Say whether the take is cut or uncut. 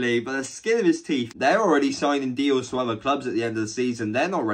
cut